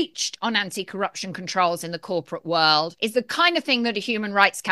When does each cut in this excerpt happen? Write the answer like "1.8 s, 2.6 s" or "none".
2.9 s